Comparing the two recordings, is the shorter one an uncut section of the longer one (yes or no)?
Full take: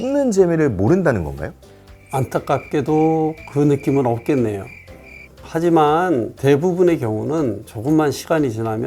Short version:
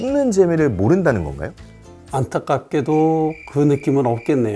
yes